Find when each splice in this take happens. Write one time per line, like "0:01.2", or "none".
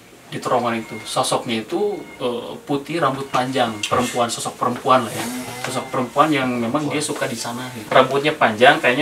0:07.7